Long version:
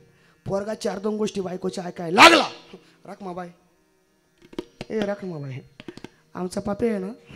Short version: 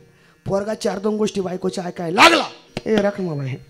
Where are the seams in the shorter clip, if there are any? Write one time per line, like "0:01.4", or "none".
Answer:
0:02.7